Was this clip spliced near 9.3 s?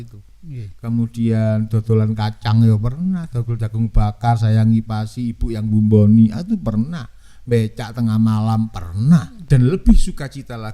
yes; 1 cut; at 9.3 s

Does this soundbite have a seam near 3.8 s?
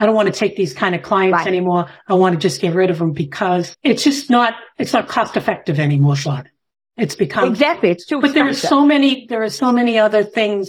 yes; 1 cut; at 3.8 s

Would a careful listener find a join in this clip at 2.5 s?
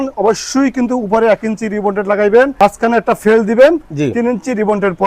yes; 1 cut; at 2.5 s

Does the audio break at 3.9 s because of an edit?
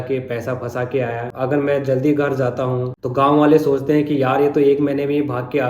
no; 1 cut; at 1.3 s

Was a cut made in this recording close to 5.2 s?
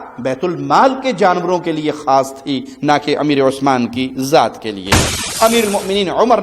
yes; 1 cut; at 5.2 s

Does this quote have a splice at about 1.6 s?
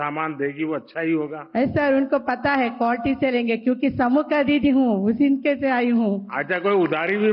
no; 0 cuts

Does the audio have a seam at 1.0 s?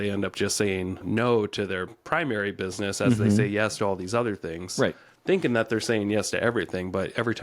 yes; 1 cut; at 1.0 s

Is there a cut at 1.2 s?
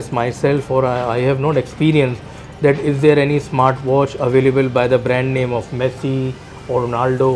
no; 0 cuts

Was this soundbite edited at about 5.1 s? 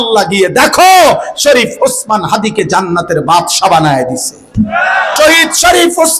yes; 1 cut; at 5.1 s

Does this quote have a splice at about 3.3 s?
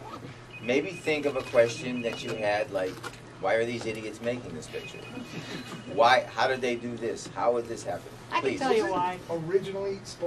no; 0 cuts

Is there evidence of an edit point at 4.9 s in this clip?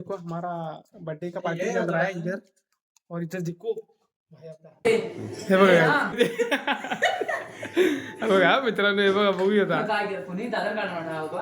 yes; 2 cuts; at 4.9 s, 6.1 s

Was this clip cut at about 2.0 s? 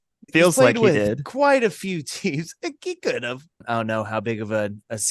no; 1 cut; at 3.5 s

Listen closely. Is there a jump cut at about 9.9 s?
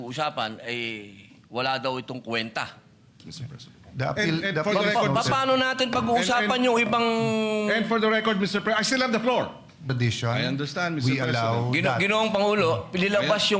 yes; 2 cuts; at 3.2 s, 9.9 s

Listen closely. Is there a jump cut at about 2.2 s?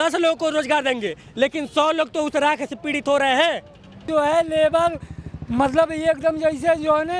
no; 1 cut; at 4.1 s

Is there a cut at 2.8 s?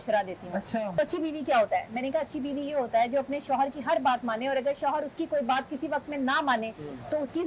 no; 1 cut; at 0.9 s

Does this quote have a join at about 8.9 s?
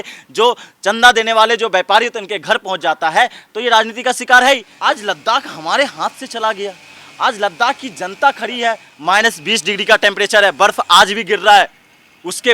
yes; 2 cuts; at 4.7 s, 8.9 s

